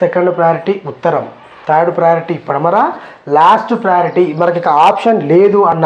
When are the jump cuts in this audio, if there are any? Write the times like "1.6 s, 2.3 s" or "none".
none